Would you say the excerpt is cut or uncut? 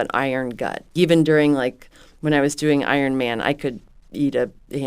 cut